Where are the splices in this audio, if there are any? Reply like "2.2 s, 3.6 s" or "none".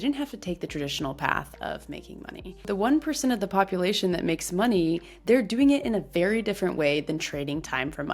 2.6 s, 5.1 s